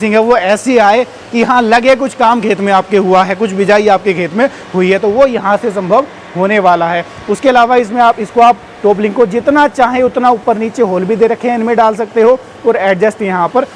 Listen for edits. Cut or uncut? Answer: uncut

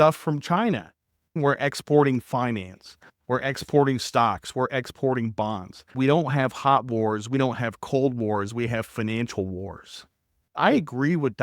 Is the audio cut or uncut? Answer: cut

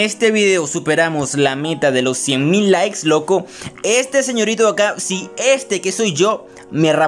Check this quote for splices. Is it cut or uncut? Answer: uncut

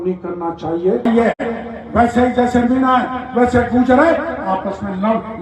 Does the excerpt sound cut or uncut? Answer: cut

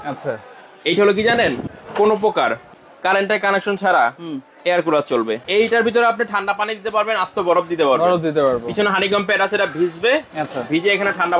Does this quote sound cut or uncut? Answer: cut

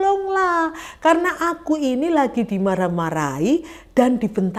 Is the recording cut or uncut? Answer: uncut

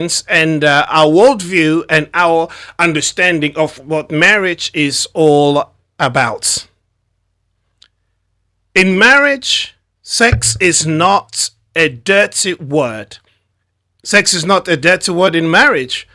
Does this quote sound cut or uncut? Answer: uncut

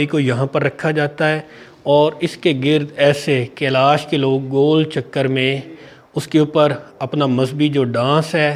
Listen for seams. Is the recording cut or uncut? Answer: uncut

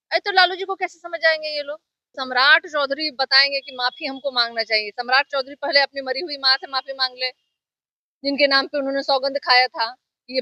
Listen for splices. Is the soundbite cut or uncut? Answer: cut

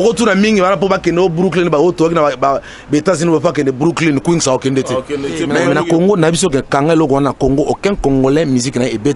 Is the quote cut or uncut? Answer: cut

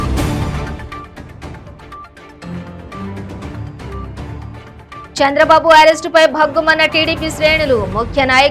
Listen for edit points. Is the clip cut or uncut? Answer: cut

